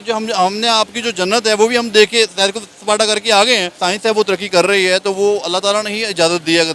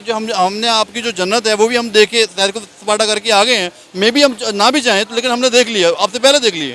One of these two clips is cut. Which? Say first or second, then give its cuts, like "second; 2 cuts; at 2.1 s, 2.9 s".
first; 1 cut; at 3.8 s